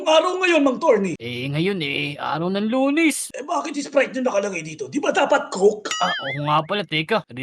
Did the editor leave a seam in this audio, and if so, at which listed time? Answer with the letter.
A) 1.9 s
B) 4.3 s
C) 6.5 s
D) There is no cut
D